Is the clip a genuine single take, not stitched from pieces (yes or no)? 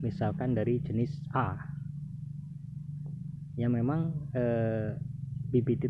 yes